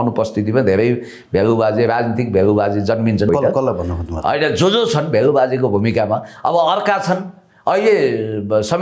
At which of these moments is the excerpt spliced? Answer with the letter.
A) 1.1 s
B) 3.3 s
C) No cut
B